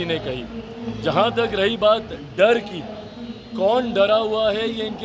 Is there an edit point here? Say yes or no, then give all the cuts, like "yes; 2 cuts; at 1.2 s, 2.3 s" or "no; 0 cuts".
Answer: no; 0 cuts